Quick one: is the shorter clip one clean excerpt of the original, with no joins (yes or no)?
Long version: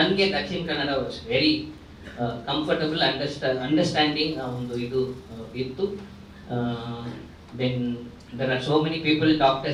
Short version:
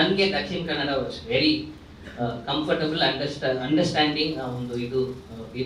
yes